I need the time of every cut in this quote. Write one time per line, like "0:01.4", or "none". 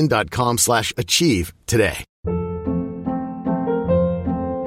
0:02.1